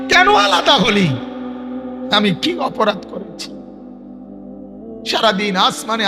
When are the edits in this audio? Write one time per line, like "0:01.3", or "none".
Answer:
none